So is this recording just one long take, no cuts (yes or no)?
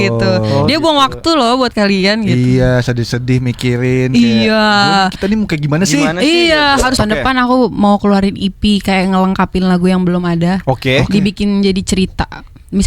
no